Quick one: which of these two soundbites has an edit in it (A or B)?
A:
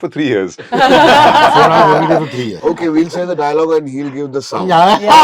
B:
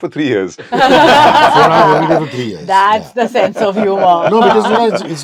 A